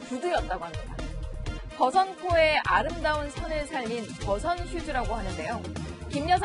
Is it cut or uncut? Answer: uncut